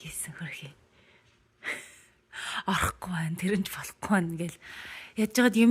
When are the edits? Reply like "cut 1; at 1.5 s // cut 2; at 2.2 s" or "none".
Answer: none